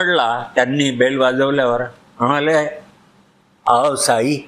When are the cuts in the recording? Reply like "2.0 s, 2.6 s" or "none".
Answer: none